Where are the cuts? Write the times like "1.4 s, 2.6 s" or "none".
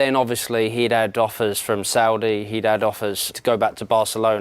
3.3 s